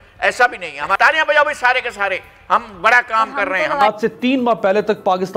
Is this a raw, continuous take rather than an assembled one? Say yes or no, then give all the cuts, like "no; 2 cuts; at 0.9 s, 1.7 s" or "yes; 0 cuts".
no; 2 cuts; at 0.9 s, 3.8 s